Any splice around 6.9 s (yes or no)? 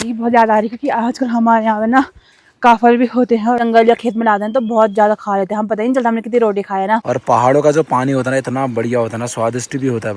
yes